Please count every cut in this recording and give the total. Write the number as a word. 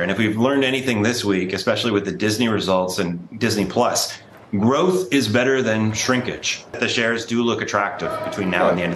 one